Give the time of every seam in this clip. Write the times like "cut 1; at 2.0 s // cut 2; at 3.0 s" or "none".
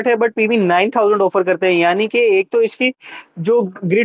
none